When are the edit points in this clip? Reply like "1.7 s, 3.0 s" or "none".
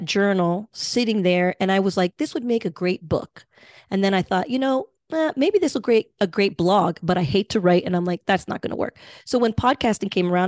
none